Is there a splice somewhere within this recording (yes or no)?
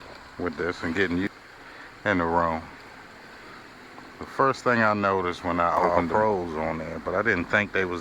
yes